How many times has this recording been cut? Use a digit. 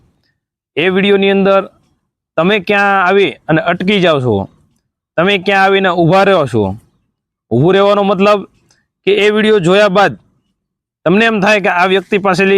0